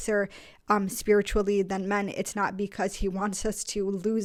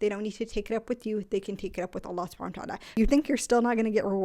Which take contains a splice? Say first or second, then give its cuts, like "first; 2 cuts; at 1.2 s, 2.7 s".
second; 1 cut; at 2.8 s